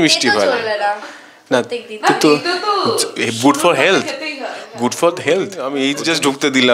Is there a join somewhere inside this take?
yes; 1 cut; at 5.6 s

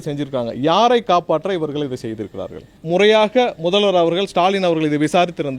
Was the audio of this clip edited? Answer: yes; 1 cut; at 2.7 s

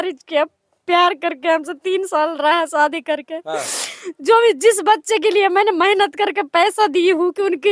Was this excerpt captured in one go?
yes; 0 cuts

